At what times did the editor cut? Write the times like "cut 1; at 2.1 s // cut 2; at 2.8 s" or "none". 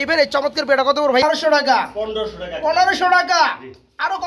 cut 1; at 1.2 s